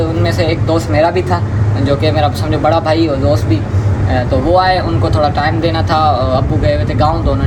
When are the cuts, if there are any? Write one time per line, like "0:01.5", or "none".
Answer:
none